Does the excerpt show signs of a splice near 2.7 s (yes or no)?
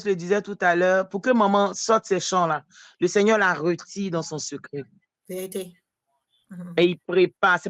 no